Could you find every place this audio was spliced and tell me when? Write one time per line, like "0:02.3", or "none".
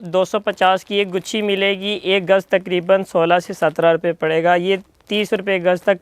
none